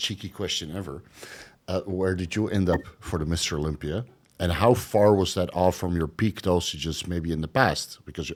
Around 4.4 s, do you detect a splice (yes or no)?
no